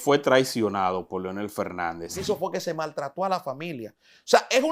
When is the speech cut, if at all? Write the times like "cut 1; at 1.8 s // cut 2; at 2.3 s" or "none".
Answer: cut 1; at 2.2 s